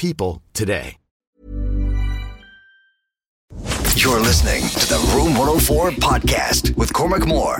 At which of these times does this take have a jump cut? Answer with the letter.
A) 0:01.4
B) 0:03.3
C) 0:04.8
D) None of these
B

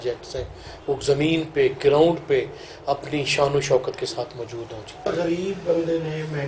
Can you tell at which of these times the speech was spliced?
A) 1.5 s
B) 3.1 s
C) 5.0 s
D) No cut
C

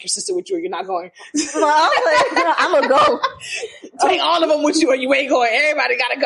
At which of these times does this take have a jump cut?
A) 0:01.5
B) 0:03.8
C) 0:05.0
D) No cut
D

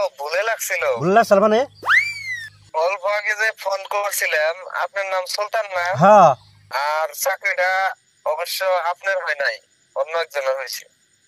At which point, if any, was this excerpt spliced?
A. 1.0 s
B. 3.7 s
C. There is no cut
C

